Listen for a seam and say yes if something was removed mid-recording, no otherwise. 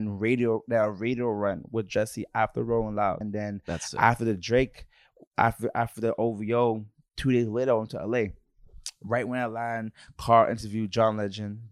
yes